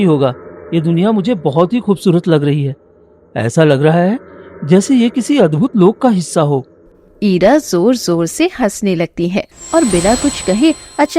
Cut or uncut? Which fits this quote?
cut